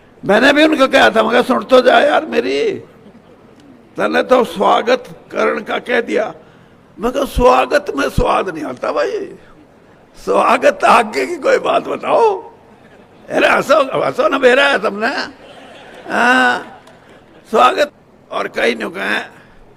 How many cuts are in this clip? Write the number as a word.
one